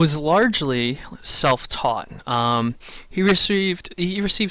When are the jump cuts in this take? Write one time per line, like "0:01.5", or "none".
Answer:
0:03.4